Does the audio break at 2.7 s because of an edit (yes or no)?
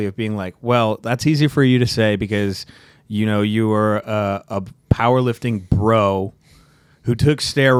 no